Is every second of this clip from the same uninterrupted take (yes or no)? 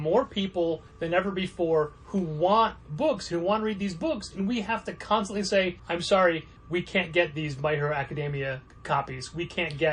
no